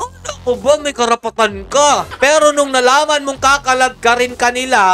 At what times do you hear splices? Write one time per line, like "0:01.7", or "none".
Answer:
0:02.1